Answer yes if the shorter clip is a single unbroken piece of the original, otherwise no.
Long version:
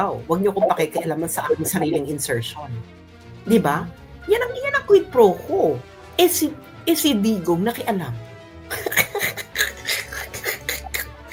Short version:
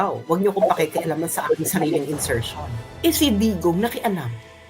no